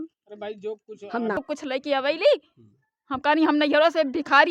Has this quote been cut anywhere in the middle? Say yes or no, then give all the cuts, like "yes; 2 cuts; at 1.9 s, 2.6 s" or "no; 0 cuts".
yes; 1 cut; at 1.4 s